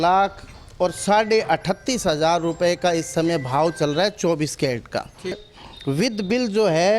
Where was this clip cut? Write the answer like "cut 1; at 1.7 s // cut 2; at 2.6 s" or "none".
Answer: cut 1; at 5.5 s